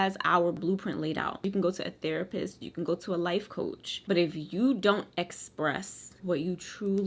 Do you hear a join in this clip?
no; 0 cuts

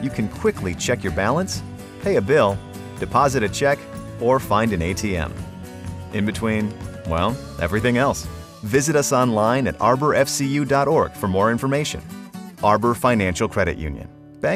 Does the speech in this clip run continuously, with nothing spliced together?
yes; 0 cuts

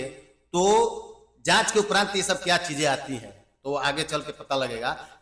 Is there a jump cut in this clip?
no; 0 cuts

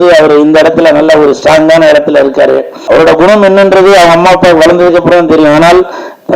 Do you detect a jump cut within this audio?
yes; 1 cut; at 2.7 s

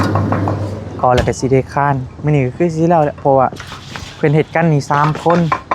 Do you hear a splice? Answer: no; 0 cuts

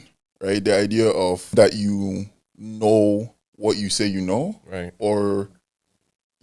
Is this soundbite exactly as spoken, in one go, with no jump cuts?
no; 1 cut; at 1.6 s

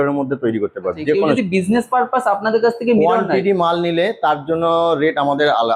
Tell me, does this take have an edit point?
yes; 1 cut; at 1.4 s

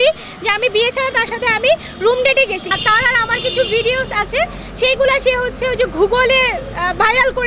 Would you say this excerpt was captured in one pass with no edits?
no; 1 cut; at 2.7 s

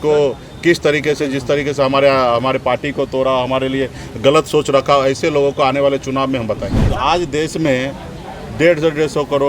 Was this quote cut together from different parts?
yes; 1 cut; at 6.8 s

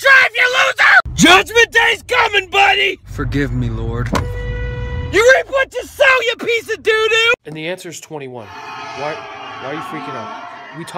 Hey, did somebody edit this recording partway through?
yes; 1 cut; at 1.0 s

